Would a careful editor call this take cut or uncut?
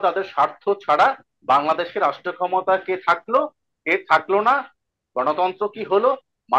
uncut